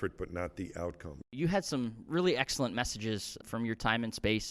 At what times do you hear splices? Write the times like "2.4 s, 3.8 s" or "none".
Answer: 1.4 s, 3.4 s